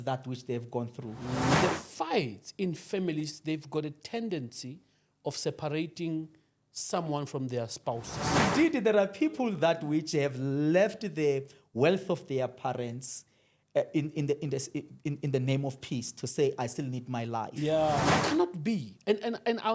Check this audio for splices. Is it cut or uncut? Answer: cut